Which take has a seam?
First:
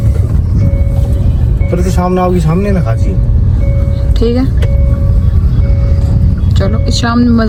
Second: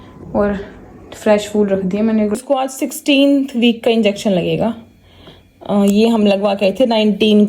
second; 1 cut; at 2.3 s

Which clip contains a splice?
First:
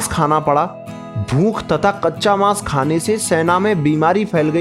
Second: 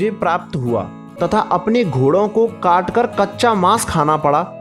second; 1 cut; at 1.0 s

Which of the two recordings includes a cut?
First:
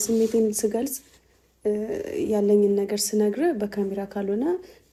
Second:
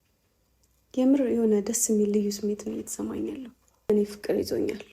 second; 1 cut; at 3.9 s

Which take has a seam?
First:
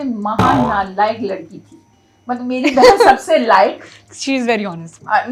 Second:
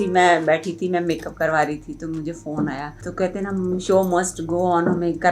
second; 1 cut; at 3.0 s

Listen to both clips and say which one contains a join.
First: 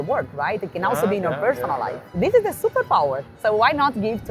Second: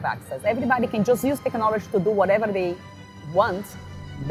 first; 2 cuts; at 2.2 s, 3.3 s

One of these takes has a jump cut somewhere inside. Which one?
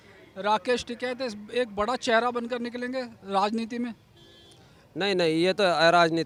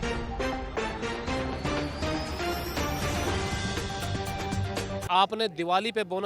second; 1 cut; at 5.1 s

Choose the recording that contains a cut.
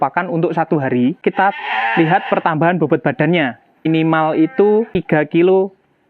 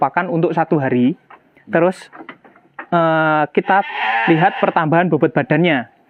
first; 3 cuts; at 1.2 s, 3.9 s, 4.9 s

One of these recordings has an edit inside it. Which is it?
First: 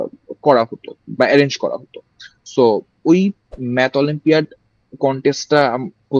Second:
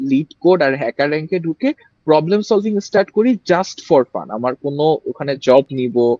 first; 1 cut; at 3.5 s

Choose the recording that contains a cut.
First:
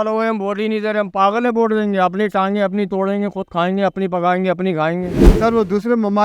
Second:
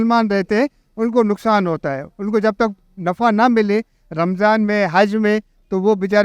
first; 1 cut; at 5.2 s

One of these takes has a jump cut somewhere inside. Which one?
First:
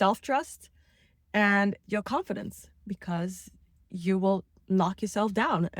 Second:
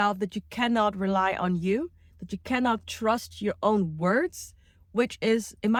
first; 1 cut; at 1.8 s

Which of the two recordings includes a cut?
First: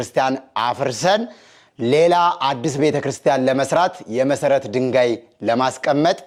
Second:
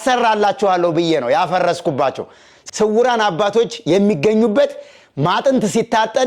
second; 1 cut; at 2.5 s

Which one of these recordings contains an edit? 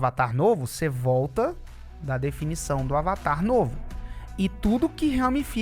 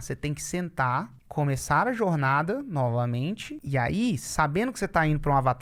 second; 2 cuts; at 1.2 s, 3.5 s

